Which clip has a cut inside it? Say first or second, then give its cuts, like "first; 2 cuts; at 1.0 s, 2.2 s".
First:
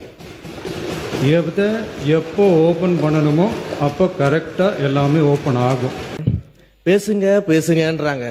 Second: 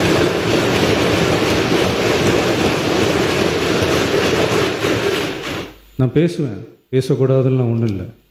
first; 1 cut; at 6.2 s